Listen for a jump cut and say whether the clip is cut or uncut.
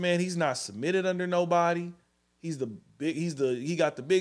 uncut